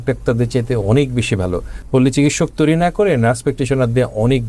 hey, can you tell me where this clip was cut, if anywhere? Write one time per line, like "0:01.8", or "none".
0:01.7